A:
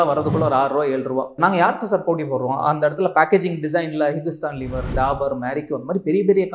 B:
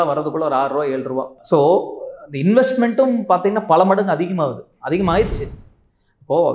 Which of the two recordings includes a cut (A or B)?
A